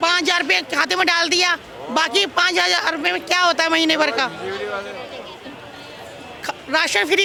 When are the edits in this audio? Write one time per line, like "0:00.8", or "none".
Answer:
none